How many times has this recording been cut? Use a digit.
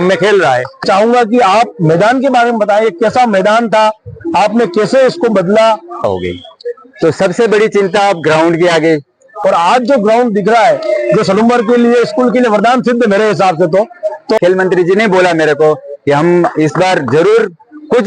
4